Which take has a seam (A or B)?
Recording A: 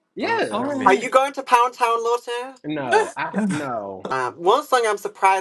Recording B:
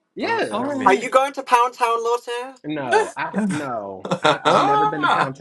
A